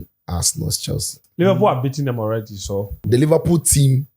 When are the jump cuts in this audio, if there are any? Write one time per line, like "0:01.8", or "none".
0:01.2
0:03.0